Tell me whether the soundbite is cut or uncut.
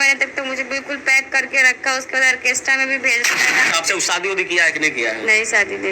cut